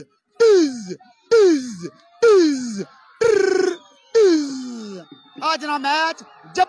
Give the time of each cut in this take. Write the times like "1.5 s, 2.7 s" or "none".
none